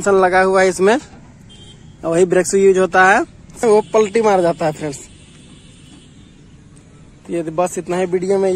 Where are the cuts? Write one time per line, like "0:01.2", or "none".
0:03.6